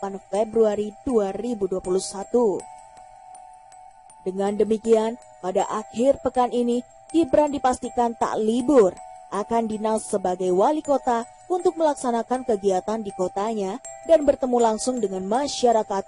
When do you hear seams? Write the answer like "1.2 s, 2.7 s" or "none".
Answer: none